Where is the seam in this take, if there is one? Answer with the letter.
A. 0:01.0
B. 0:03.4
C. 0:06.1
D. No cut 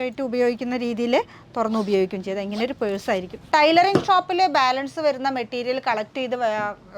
B